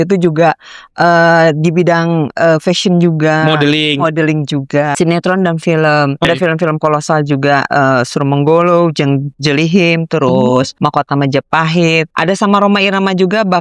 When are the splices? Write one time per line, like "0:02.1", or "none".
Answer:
0:04.9
0:06.2
0:10.7
0:12.1